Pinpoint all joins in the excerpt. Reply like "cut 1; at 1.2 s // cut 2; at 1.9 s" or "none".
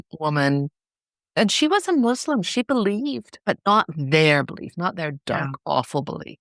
cut 1; at 1.4 s // cut 2; at 3.3 s